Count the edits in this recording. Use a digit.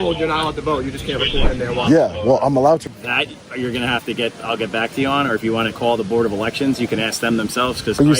1